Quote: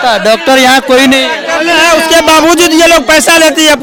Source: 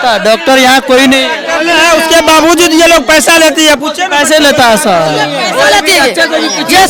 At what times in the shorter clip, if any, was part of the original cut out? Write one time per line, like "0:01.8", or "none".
none